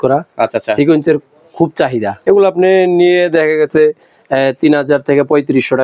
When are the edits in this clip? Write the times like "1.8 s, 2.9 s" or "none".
2.2 s